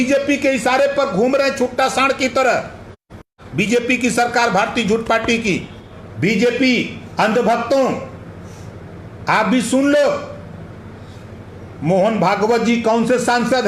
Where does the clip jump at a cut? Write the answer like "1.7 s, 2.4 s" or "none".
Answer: 3.4 s, 6.0 s